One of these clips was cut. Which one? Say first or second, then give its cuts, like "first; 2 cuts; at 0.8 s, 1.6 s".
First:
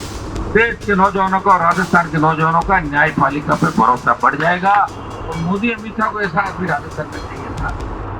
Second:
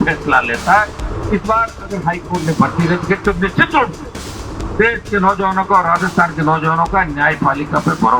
first; 1 cut; at 5.0 s